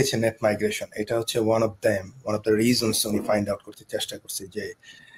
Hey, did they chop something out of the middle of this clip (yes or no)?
no